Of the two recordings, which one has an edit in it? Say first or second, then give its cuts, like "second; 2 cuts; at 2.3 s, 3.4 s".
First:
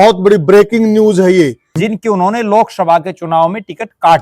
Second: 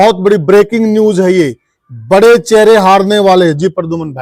first; 1 cut; at 1.7 s